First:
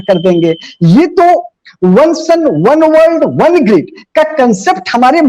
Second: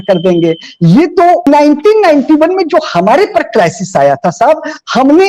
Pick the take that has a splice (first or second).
second